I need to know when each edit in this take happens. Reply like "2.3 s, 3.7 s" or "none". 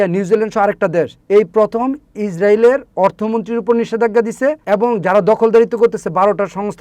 1.2 s, 4.6 s

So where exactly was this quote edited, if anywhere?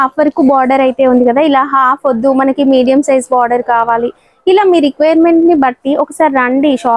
none

